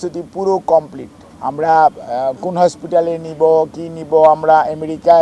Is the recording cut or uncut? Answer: uncut